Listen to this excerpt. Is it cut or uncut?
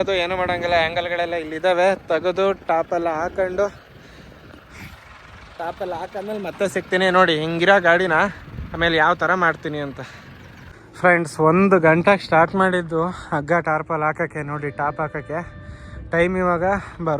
uncut